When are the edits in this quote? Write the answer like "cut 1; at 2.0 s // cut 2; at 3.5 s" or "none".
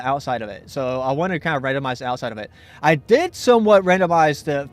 cut 1; at 1.4 s